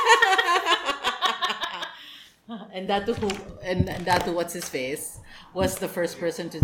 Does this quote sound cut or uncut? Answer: uncut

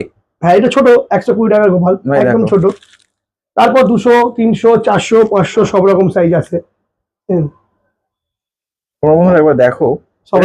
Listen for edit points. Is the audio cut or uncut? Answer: uncut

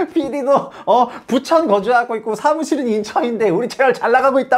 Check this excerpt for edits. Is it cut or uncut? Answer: uncut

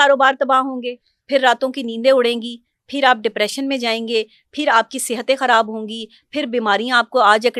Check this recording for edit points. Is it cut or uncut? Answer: uncut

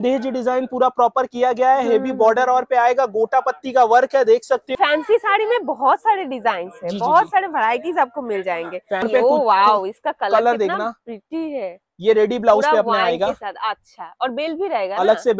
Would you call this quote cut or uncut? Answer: cut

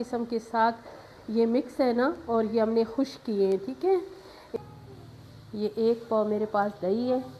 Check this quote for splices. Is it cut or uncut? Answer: cut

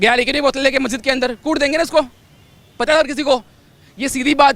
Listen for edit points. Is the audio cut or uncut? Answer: uncut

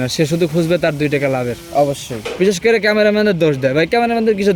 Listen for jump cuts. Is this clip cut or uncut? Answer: cut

